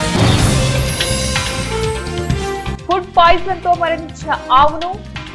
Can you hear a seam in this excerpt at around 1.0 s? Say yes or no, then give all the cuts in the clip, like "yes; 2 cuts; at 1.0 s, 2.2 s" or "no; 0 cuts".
yes; 1 cut; at 1.0 s